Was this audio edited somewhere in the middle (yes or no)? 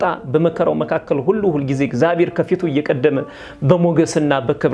no